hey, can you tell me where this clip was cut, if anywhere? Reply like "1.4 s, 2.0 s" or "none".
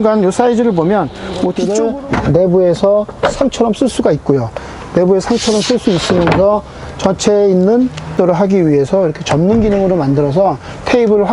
1.6 s, 8.1 s